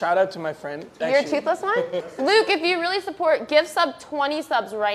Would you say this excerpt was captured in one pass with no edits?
no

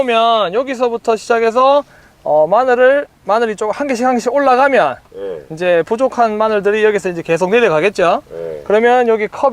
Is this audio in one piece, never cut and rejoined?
yes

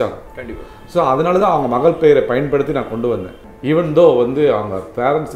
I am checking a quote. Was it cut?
no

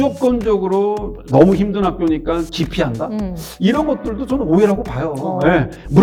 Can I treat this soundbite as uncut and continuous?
yes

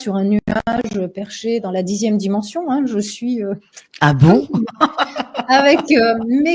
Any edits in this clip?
no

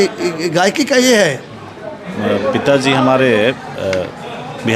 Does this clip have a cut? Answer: yes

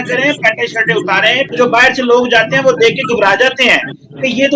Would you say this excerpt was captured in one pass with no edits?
no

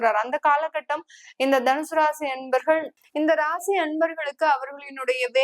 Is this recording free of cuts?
no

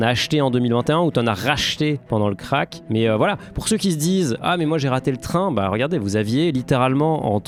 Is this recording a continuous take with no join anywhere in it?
yes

